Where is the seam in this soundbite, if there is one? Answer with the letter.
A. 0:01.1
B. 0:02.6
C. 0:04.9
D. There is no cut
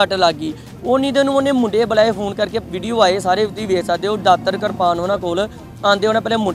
B